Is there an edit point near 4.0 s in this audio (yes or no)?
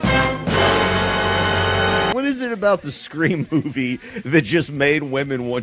no